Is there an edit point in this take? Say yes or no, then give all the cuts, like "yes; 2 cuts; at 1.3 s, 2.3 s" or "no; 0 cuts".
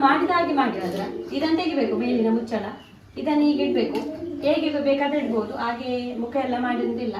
no; 0 cuts